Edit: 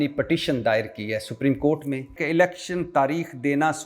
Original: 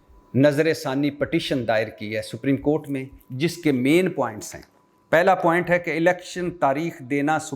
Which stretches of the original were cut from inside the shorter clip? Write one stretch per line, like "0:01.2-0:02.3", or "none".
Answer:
0:03.2-0:05.9